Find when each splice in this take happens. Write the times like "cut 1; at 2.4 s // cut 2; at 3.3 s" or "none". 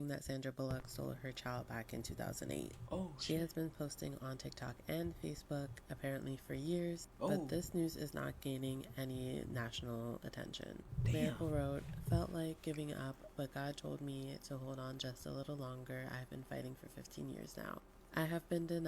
none